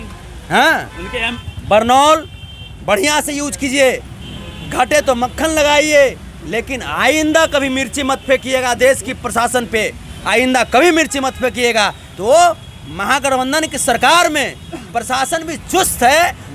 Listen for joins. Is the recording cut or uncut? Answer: cut